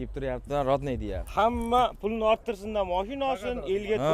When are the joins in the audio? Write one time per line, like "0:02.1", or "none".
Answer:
0:01.2